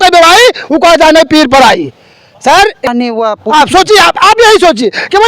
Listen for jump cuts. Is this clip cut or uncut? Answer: cut